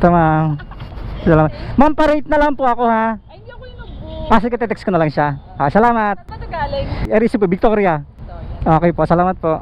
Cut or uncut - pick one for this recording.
uncut